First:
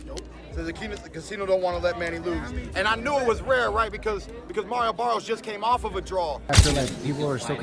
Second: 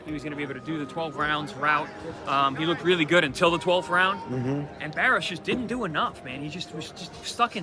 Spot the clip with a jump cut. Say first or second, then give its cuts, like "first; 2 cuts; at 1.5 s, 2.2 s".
first; 1 cut; at 6.5 s